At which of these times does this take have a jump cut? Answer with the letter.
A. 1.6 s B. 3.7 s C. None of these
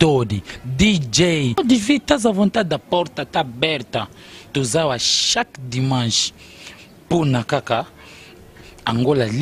A